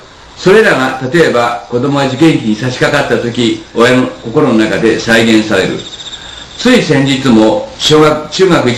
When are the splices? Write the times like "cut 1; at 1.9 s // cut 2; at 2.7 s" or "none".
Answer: cut 1; at 6.2 s